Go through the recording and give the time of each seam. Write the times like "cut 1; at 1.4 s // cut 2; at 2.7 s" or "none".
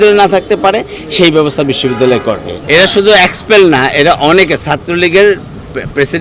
cut 1; at 2.6 s